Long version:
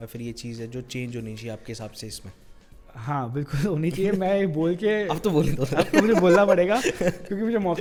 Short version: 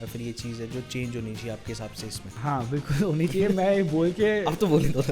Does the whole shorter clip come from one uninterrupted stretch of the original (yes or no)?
no